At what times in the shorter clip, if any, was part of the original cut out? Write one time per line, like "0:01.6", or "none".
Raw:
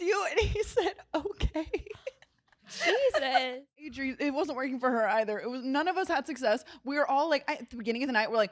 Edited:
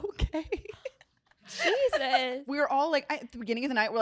0:02.4